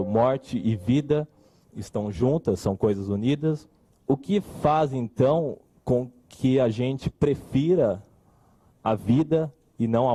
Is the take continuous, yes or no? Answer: yes